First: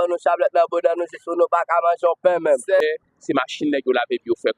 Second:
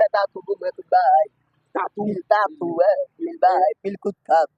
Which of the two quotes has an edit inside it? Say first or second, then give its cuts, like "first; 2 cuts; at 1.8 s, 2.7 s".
first; 1 cut; at 2.8 s